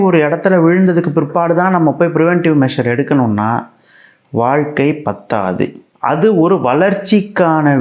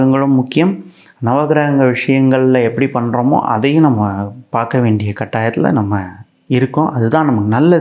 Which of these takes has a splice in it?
first; 1 cut; at 5.8 s

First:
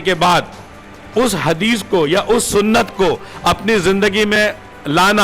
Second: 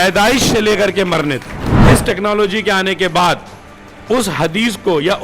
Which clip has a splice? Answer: second; 1 cut; at 1.7 s

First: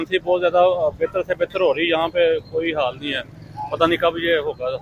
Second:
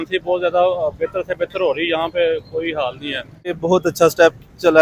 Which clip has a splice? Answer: second; 1 cut; at 3.6 s

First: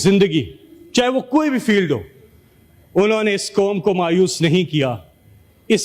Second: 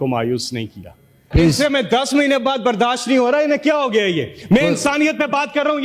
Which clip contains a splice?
second; 1 cut; at 1.3 s

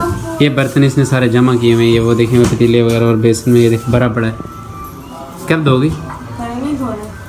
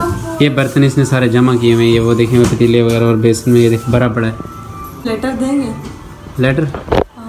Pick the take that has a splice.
second; 1 cut; at 5.1 s

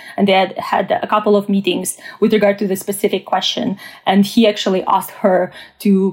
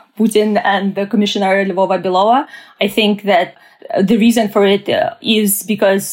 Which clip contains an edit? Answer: second; 2 cuts; at 3.5 s, 5.2 s

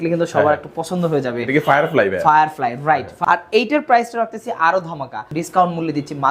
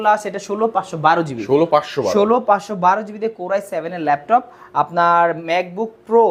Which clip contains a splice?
first; 2 cuts; at 3.1 s, 5.3 s

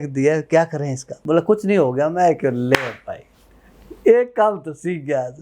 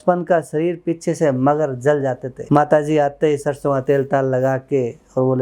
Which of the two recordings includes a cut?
first; 1 cut; at 1.1 s

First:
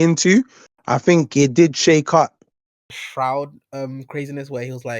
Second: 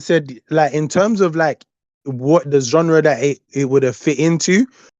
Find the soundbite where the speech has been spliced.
first; 1 cut; at 2.8 s

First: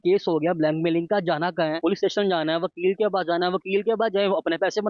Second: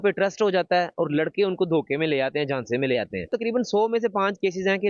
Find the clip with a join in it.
second; 1 cut; at 3.3 s

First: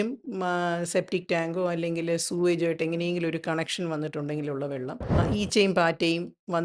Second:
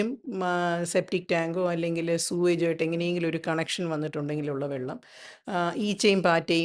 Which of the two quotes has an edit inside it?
first; 1 cut; at 5.2 s

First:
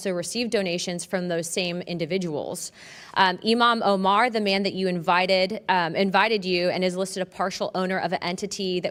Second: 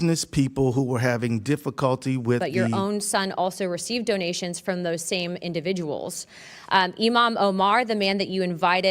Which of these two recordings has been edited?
second; 1 cut; at 2.6 s

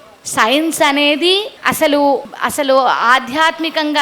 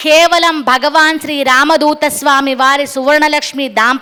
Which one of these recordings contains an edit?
first; 2 cuts; at 1.5 s, 2.3 s

